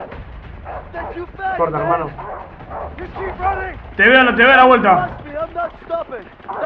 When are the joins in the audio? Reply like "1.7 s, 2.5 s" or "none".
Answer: none